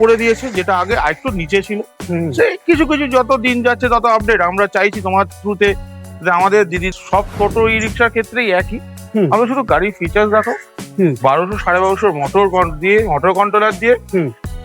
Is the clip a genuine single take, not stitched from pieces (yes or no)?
no